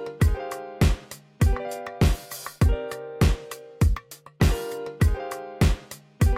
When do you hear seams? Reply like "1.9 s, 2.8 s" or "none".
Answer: 3.0 s